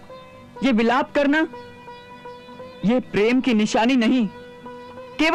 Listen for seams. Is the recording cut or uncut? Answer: uncut